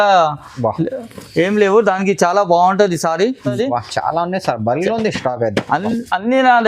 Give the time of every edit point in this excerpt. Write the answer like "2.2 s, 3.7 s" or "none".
3.5 s